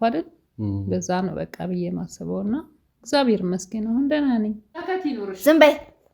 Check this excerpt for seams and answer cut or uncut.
cut